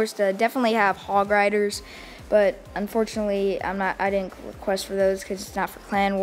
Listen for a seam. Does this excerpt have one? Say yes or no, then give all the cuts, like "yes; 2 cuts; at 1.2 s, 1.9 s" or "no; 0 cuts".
yes; 1 cut; at 4.8 s